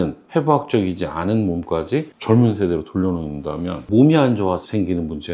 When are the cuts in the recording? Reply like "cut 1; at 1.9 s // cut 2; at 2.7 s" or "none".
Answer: cut 1; at 3.8 s

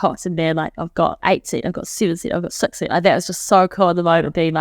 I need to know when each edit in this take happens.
cut 1; at 1.2 s

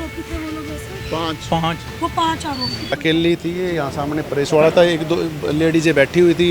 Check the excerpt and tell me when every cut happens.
cut 1; at 2.9 s

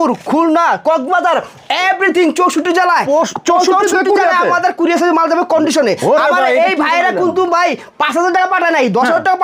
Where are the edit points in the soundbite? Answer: none

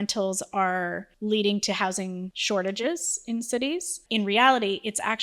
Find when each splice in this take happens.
cut 1; at 1.1 s // cut 2; at 2.3 s // cut 3; at 4.0 s

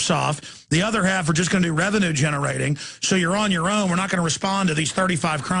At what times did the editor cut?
cut 1; at 2.5 s

